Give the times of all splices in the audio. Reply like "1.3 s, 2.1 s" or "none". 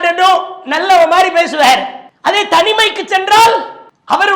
none